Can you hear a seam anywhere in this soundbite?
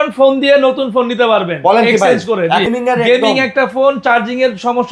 yes; 1 cut; at 2.7 s

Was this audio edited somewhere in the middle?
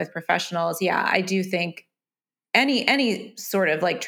no; 0 cuts

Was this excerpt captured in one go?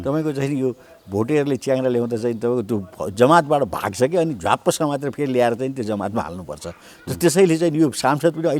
yes; 0 cuts

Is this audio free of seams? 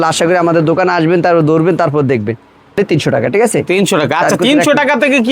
no; 1 cut; at 2.8 s

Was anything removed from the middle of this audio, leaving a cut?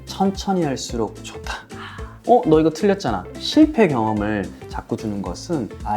yes; 3 cuts; at 2.1 s, 3.3 s, 5.0 s

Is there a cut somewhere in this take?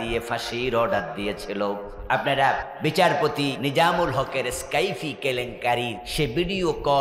yes; 4 cuts; at 1.9 s, 2.7 s, 3.6 s, 6.0 s

